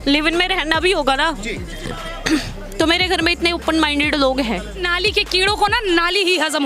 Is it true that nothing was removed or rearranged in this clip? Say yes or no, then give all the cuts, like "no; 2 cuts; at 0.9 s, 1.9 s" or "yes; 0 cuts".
no; 1 cut; at 4.9 s